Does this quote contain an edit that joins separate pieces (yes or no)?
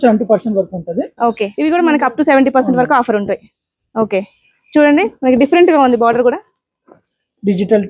yes